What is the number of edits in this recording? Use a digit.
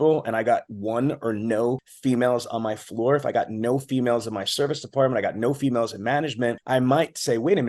2